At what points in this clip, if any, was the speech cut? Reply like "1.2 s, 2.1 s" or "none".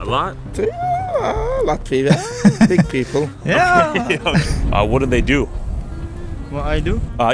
none

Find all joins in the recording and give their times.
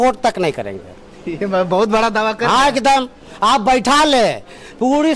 none

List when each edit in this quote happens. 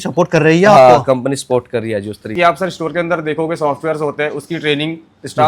2.3 s

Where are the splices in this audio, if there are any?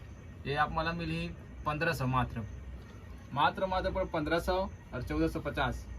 none

